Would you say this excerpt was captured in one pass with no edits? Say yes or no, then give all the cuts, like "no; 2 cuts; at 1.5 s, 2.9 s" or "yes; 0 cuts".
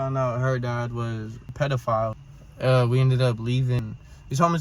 no; 3 cuts; at 1.5 s, 2.2 s, 3.8 s